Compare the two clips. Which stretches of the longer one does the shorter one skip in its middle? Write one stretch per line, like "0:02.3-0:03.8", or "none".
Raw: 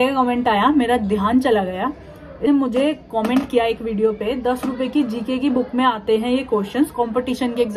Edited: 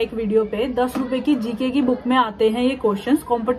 none

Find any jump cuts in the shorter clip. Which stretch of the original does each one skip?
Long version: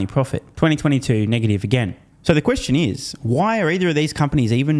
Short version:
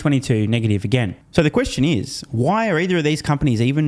0:02.0-0:02.1

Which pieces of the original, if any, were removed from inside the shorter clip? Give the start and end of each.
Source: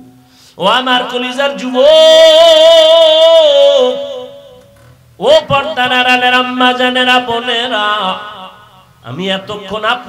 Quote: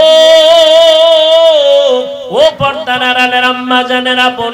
0:04.1-0:05.1

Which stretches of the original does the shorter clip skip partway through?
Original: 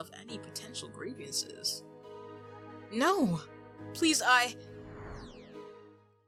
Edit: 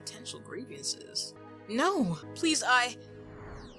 0:01.8-0:02.6
0:03.5-0:03.8

